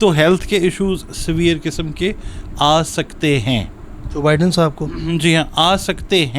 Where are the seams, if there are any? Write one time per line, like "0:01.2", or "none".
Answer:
none